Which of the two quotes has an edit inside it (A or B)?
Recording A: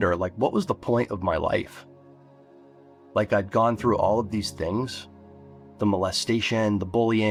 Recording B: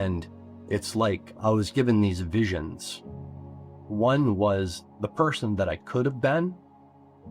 B